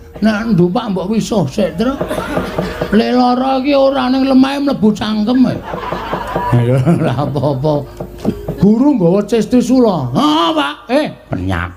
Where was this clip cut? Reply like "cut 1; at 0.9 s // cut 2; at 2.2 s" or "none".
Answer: none